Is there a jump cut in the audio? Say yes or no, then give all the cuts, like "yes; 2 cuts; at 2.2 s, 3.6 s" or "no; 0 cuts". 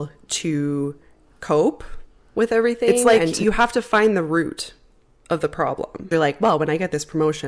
yes; 2 cuts; at 3.0 s, 6.0 s